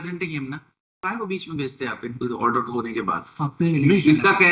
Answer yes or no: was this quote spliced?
yes